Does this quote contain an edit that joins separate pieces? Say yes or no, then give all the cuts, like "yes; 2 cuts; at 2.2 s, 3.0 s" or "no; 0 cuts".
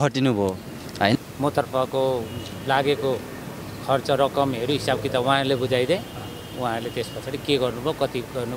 yes; 1 cut; at 1.1 s